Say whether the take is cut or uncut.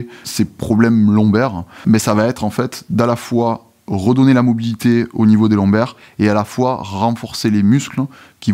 uncut